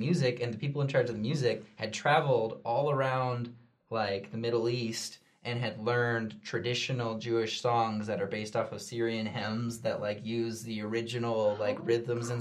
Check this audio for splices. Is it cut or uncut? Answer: uncut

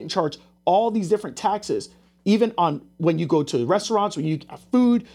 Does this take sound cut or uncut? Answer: uncut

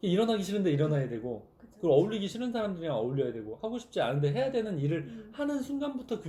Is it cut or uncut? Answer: uncut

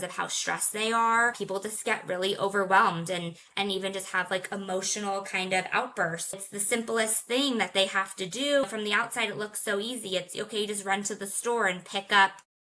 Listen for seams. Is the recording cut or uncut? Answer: cut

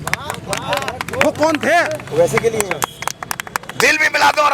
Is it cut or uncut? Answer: cut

